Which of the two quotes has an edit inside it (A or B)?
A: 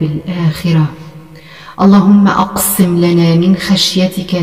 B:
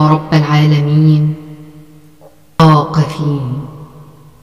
B